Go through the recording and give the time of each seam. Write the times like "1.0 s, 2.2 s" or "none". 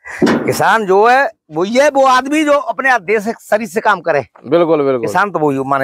none